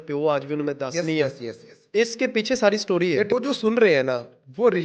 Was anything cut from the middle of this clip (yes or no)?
yes